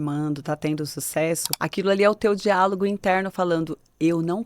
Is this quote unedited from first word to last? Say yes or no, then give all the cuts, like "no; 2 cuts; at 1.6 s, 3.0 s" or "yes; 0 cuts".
no; 1 cut; at 1.5 s